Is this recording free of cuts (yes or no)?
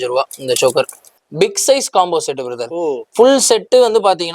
no